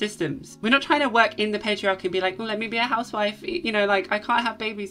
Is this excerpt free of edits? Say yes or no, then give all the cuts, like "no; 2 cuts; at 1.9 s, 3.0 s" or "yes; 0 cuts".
yes; 0 cuts